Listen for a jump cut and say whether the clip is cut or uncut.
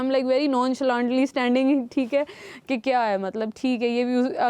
uncut